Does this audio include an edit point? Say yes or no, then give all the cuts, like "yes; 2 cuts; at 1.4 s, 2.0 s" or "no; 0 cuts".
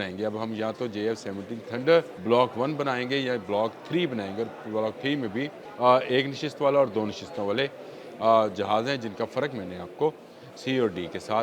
yes; 2 cuts; at 2.1 s, 5.6 s